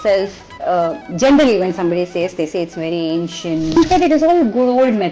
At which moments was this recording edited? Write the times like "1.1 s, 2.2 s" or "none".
3.8 s